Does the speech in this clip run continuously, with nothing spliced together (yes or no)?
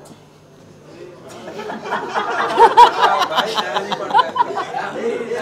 yes